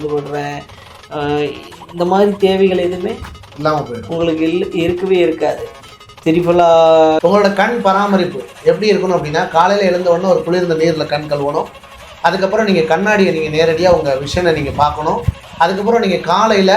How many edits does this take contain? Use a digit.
1